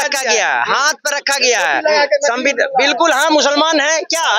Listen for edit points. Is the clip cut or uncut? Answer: uncut